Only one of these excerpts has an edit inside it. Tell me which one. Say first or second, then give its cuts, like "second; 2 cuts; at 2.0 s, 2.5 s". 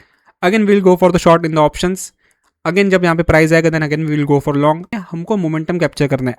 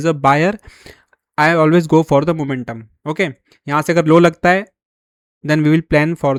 first; 1 cut; at 5.0 s